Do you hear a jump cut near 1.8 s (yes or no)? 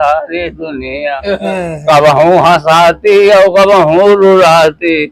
no